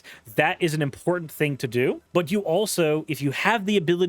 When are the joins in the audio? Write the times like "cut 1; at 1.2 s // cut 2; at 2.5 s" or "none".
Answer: cut 1; at 2.0 s